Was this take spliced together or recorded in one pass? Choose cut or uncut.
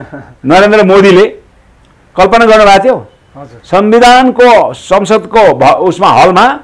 uncut